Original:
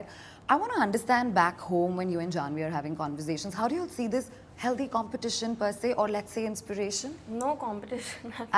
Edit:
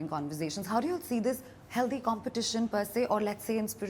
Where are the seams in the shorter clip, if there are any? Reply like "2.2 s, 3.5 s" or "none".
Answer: none